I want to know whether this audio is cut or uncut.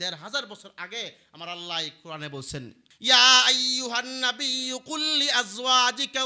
cut